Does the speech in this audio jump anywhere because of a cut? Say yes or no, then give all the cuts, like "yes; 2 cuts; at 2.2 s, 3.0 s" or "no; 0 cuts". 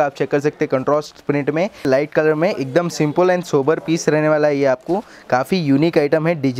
yes; 1 cut; at 1.8 s